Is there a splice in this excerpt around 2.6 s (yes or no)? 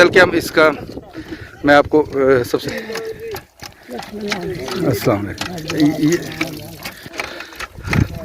yes